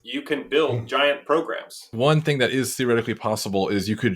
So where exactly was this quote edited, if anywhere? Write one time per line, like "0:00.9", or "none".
0:01.9